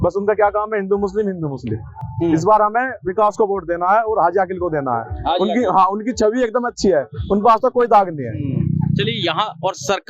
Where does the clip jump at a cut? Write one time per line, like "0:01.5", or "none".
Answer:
none